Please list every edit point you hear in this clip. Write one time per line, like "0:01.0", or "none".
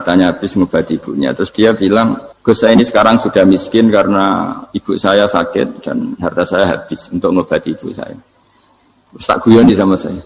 0:02.3